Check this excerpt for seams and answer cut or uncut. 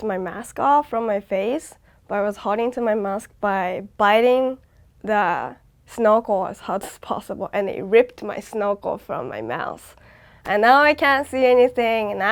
uncut